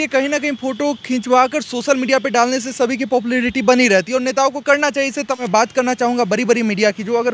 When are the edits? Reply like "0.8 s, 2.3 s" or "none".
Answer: 5.3 s

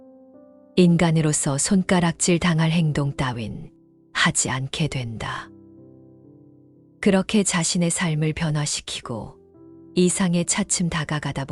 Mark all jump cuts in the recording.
5.5 s, 7.0 s

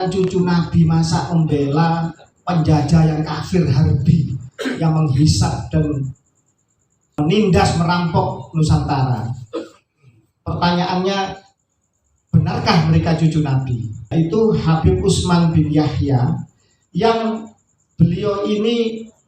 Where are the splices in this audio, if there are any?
7.2 s, 14.1 s

